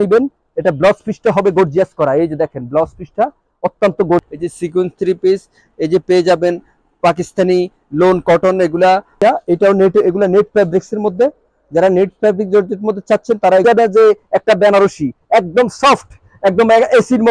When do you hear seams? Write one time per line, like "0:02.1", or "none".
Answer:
0:04.3
0:09.2
0:13.6